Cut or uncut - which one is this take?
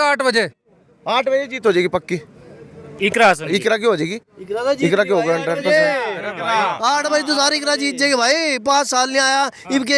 uncut